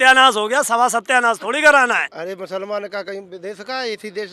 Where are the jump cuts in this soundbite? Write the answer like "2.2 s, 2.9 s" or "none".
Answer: 2.1 s

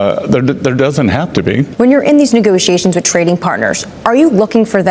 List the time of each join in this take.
1.7 s

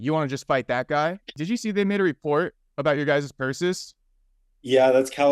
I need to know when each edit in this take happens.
1.3 s

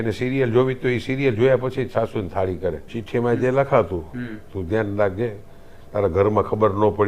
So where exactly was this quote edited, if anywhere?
3.0 s

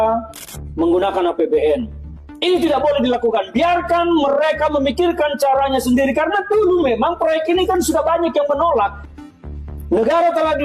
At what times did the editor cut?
9.1 s

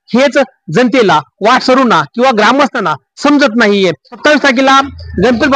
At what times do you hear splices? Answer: none

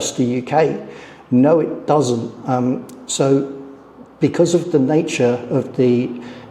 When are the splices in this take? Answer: none

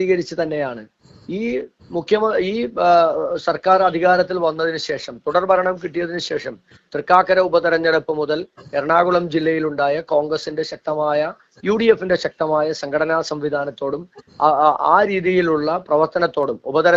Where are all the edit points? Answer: none

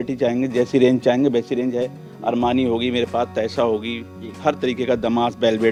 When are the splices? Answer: none

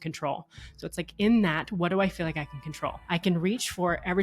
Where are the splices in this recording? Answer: 3.0 s

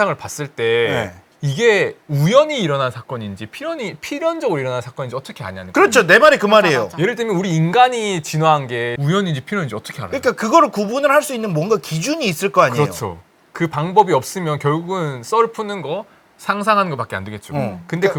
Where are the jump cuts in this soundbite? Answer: none

